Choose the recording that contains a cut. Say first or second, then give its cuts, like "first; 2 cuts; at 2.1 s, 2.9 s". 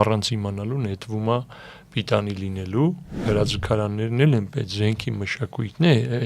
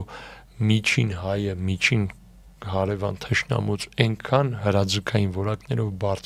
first; 1 cut; at 3.2 s